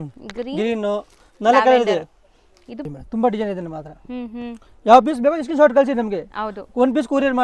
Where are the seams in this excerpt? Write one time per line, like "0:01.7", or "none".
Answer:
0:02.9